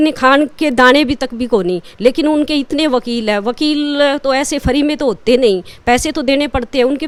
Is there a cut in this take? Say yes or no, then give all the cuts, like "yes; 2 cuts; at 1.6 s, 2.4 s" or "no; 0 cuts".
no; 0 cuts